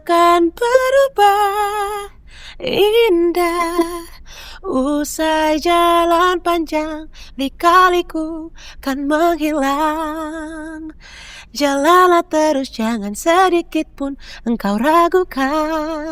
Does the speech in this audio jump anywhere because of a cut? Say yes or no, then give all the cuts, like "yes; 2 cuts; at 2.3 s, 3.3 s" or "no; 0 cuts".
no; 0 cuts